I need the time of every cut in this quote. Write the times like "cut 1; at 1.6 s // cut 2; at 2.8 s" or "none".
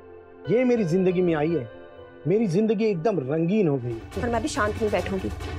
cut 1; at 4.0 s